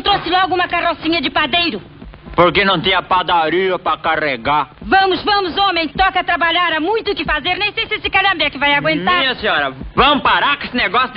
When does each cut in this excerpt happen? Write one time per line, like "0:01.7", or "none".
none